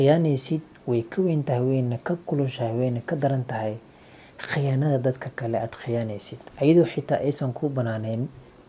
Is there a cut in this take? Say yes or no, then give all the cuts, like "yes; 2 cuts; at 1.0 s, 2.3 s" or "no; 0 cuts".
no; 0 cuts